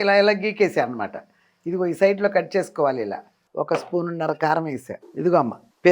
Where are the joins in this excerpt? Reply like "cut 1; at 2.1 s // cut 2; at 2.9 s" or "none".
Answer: cut 1; at 3.4 s